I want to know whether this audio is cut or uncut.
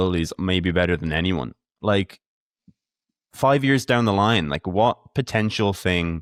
uncut